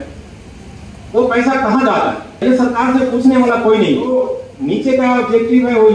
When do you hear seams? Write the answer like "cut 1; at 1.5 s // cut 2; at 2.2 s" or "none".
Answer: cut 1; at 2.4 s // cut 2; at 4.1 s